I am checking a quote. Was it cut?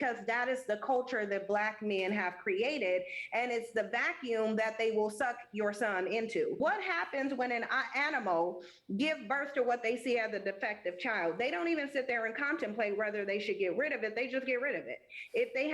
yes; 1 cut; at 6.6 s

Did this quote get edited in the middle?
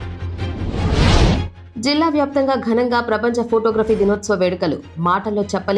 no; 0 cuts

